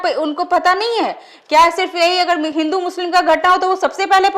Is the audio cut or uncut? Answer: uncut